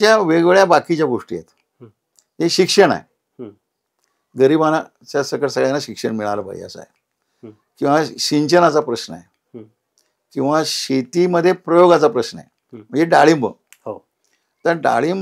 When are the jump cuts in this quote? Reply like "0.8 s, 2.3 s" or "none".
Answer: none